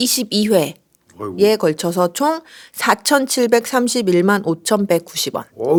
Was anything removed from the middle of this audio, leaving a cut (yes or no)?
no